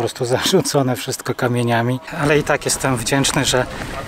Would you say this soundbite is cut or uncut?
cut